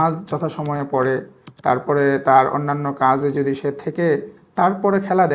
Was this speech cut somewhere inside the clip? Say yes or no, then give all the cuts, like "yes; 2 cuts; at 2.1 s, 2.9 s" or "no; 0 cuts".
no; 0 cuts